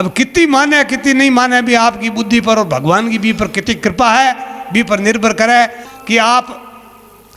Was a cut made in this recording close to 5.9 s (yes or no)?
yes